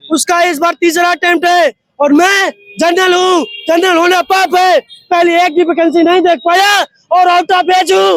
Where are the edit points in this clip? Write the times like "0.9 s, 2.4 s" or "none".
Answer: none